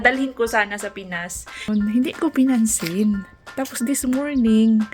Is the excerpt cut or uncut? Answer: cut